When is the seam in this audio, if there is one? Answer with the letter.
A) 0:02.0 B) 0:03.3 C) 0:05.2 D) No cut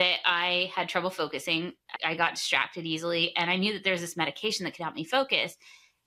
A